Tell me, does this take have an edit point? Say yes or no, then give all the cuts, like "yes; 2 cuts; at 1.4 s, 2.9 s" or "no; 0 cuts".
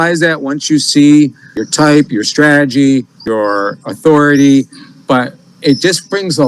yes; 2 cuts; at 1.6 s, 3.2 s